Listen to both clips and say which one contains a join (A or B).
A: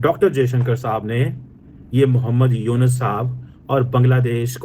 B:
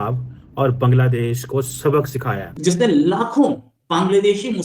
B